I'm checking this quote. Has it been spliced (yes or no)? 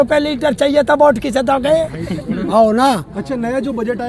yes